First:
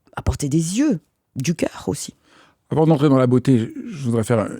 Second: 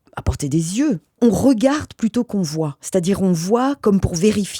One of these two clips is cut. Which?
second; 1 cut; at 1.2 s

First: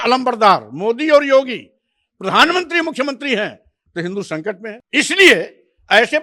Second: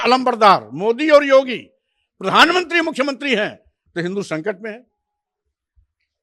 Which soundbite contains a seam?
first; 1 cut; at 4.8 s

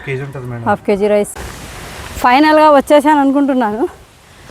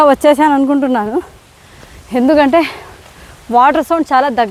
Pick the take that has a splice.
first; 1 cut; at 1.3 s

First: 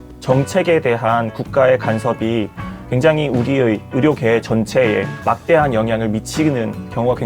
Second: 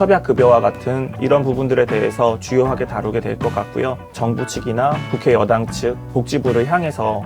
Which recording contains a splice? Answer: second; 3 cuts; at 1.1 s, 4.1 s, 5.0 s

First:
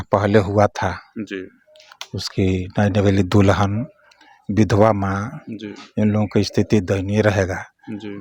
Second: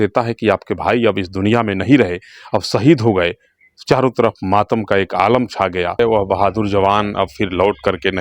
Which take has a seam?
second; 1 cut; at 6.0 s

